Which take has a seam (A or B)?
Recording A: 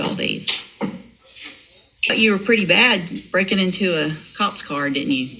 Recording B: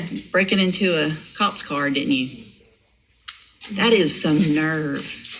A